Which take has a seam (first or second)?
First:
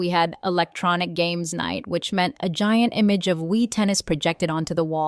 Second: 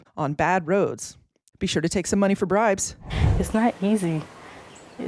second